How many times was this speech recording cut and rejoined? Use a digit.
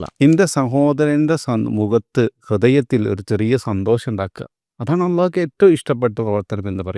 0